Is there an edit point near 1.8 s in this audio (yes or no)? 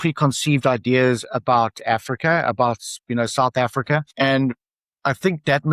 no